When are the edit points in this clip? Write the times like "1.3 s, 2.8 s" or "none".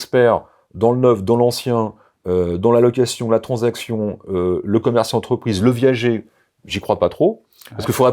none